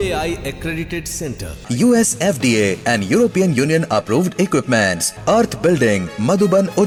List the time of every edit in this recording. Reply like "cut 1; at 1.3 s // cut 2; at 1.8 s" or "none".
none

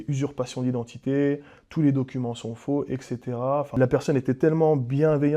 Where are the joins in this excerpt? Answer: cut 1; at 3.7 s

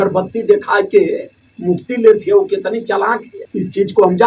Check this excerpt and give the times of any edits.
cut 1; at 3.4 s

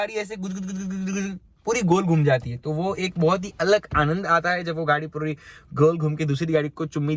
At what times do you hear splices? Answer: none

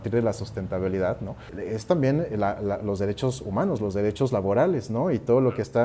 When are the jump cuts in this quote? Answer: cut 1; at 1.5 s

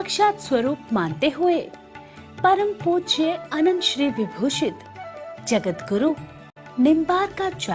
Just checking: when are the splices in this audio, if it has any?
cut 1; at 3.4 s

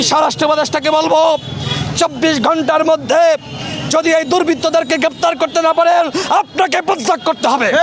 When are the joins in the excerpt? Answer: none

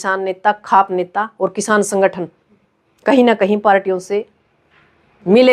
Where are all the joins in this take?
none

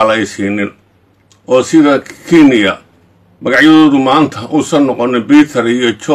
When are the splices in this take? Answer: none

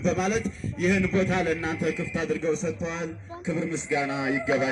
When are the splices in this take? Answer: none

